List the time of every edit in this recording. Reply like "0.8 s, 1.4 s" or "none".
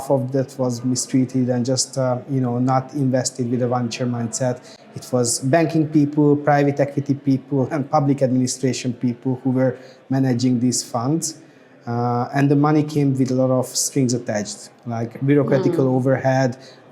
none